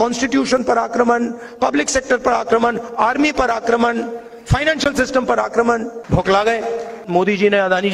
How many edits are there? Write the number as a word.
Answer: two